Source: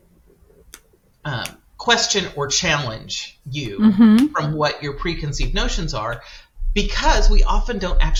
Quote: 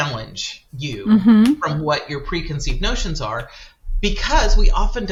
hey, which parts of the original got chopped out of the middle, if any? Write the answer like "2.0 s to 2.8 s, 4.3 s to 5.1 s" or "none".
none